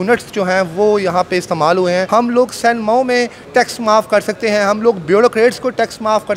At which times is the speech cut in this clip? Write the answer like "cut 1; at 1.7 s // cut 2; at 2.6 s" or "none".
cut 1; at 2.1 s